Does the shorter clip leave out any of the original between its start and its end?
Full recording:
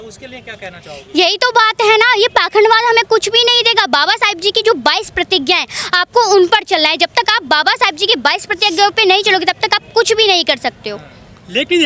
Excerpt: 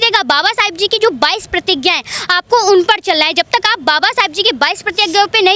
no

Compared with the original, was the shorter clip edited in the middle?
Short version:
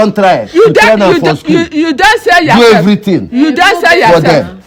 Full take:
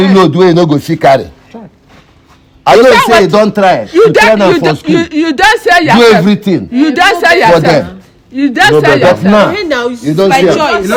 no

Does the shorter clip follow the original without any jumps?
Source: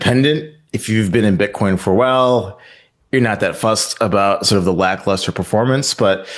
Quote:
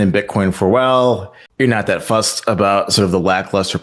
no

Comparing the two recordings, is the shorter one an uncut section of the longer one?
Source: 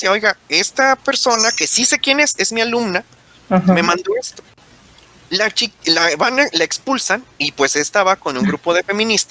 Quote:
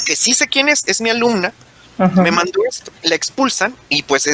no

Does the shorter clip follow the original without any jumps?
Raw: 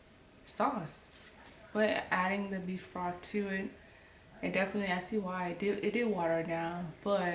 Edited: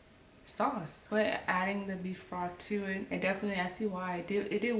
no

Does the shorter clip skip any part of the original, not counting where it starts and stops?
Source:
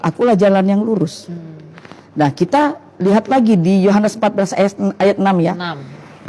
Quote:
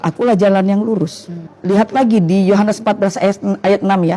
yes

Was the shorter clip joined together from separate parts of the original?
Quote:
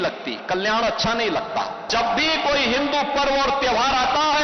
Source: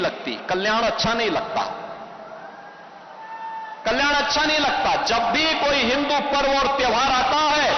yes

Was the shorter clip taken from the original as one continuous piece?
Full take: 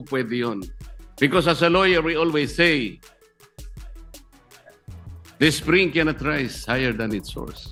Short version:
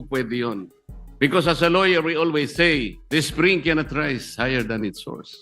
no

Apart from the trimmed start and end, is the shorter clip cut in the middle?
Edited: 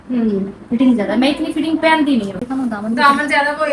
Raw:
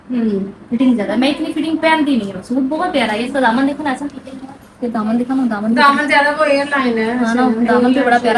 yes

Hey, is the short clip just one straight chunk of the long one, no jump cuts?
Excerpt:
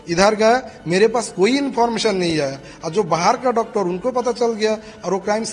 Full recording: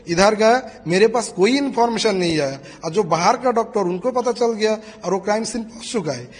yes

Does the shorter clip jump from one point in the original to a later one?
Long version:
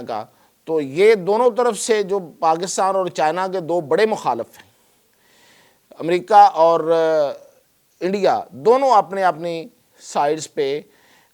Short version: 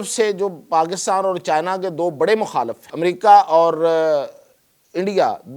yes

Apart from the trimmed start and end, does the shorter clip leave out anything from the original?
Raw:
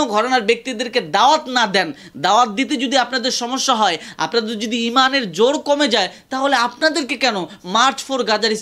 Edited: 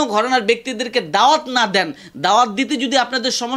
no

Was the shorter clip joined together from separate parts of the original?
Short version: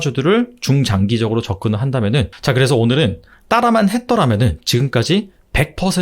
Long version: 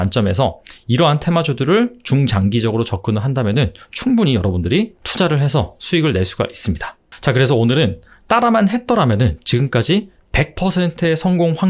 yes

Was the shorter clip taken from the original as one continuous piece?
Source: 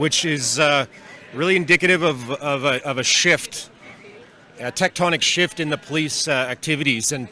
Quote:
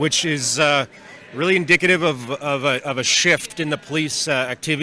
no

